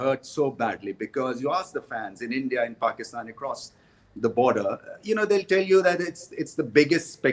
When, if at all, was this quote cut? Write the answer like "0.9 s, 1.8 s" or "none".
none